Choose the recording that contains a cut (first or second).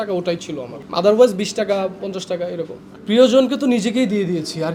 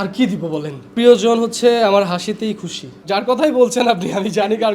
second